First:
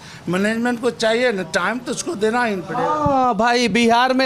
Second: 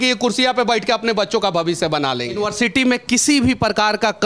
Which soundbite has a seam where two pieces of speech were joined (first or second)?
second